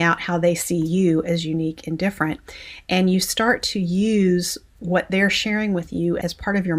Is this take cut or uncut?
uncut